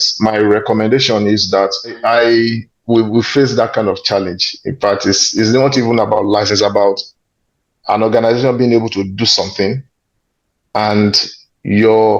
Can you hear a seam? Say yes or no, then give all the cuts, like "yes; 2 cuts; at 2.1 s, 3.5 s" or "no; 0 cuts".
yes; 1 cut; at 2.0 s